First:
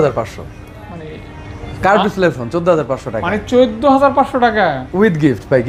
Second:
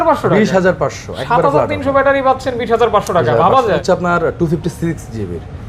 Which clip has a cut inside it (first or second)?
second